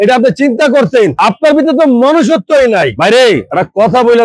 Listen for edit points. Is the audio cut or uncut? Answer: cut